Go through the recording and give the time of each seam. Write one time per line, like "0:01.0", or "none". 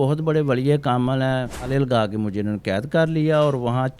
0:01.7